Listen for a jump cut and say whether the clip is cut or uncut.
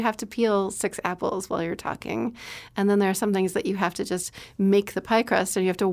uncut